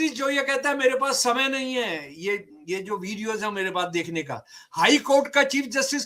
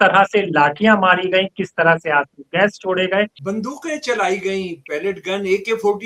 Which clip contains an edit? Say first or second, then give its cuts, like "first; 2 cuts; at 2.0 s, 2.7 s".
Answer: second; 1 cut; at 3.4 s